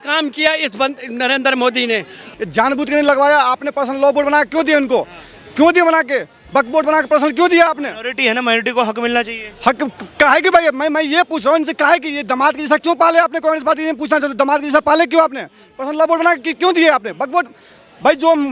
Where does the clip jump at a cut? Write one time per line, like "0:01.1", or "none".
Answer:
0:02.2